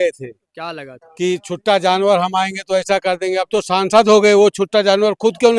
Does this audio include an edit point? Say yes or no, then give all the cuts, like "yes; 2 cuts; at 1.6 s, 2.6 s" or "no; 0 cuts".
no; 0 cuts